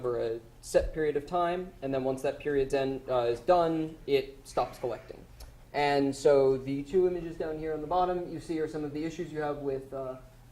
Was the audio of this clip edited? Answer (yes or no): yes